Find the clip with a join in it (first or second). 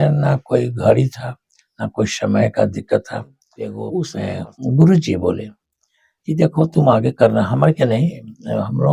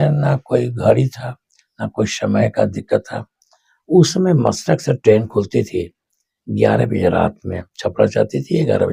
first